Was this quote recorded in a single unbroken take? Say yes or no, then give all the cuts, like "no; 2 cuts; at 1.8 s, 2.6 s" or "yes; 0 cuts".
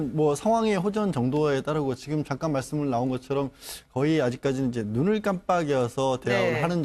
no; 1 cut; at 4.2 s